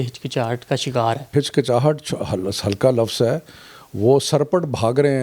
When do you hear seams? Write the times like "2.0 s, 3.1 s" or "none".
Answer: 1.3 s

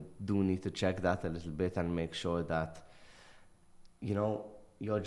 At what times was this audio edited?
none

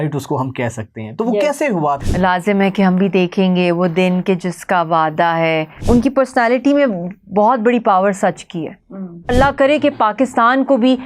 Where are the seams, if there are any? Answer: 2.0 s, 5.8 s, 9.3 s

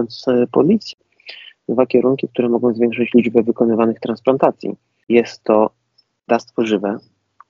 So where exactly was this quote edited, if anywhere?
0.9 s, 5.0 s

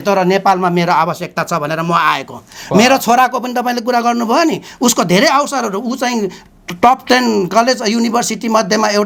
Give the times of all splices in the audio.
none

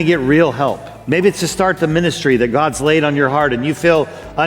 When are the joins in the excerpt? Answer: 0.9 s

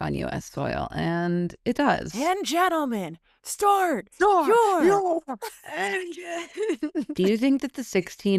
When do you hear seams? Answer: 2.1 s, 7.1 s

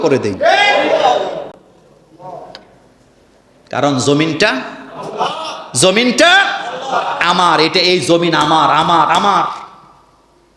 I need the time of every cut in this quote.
none

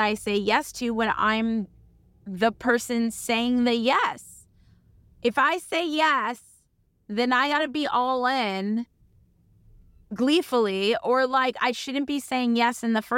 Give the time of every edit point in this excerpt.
none

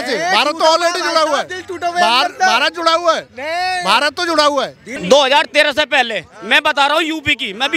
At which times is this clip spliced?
4.8 s

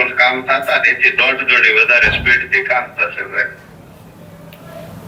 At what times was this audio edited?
none

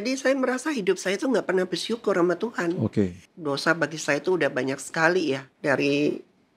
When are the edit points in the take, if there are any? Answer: 3.3 s, 5.5 s

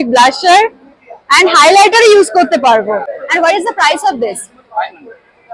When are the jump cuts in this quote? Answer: 3.2 s

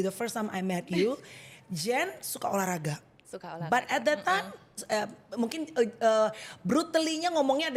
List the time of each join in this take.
none

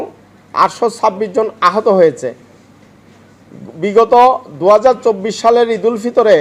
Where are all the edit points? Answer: none

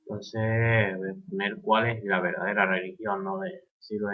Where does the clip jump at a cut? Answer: 1.9 s

